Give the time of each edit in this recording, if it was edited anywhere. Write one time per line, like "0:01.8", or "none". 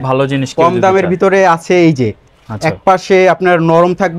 none